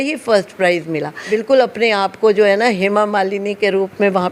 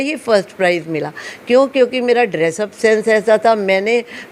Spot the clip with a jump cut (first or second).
first